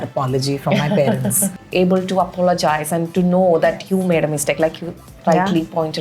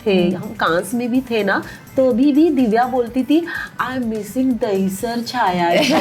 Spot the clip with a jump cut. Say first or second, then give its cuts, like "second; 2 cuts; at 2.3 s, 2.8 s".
first; 1 cut; at 1.6 s